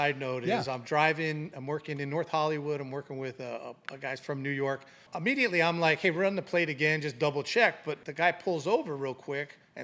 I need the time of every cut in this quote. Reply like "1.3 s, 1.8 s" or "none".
5.1 s, 8.0 s